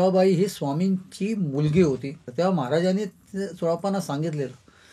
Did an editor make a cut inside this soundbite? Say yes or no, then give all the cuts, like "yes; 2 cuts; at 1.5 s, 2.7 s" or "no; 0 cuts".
yes; 1 cut; at 2.2 s